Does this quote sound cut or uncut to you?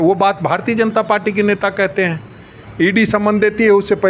uncut